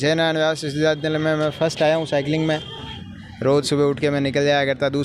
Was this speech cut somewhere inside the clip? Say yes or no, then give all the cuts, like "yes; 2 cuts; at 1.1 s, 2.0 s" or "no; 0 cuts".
yes; 1 cut; at 2.8 s